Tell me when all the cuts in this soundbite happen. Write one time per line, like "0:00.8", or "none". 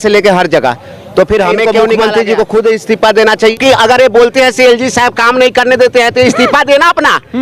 0:01.8
0:03.6